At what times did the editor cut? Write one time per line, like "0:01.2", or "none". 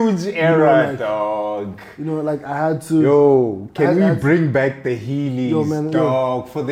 none